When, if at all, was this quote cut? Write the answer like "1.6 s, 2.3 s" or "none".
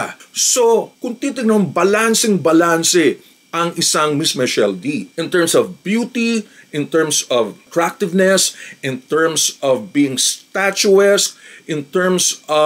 none